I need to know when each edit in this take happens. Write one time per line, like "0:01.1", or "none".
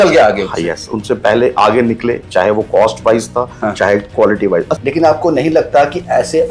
0:04.7

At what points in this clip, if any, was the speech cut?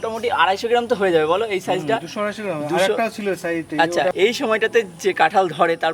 0:04.1

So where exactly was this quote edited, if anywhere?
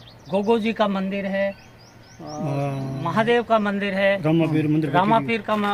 none

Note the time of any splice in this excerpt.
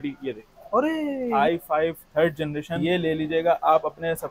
0:01.3
0:02.8

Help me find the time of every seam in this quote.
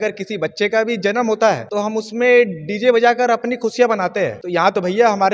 0:01.7
0:04.4

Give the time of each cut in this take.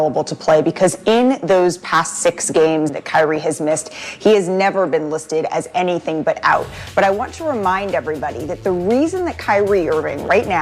0:02.9

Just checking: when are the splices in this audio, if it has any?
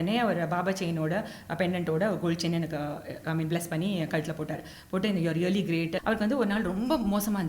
0:06.0

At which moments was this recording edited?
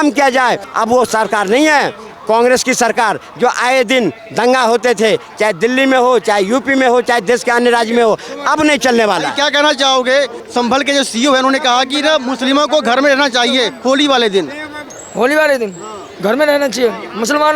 none

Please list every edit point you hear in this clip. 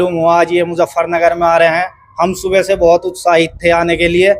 none

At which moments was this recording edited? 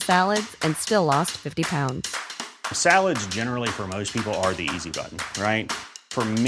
none

